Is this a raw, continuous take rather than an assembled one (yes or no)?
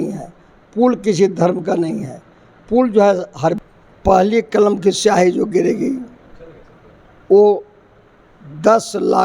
no